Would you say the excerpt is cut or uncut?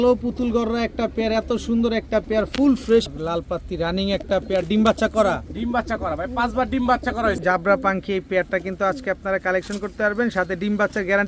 cut